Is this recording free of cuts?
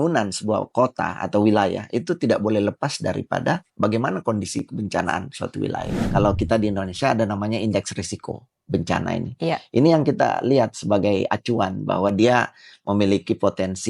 no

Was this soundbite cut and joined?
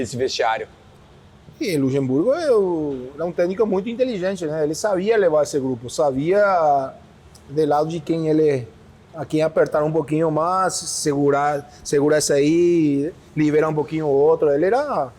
no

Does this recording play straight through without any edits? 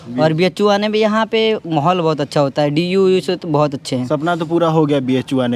yes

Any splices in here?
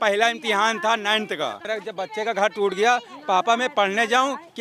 yes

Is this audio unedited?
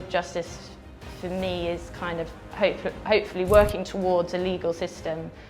yes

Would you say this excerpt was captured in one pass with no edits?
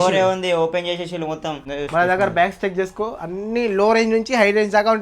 no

